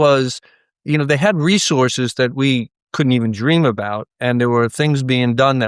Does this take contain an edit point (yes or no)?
yes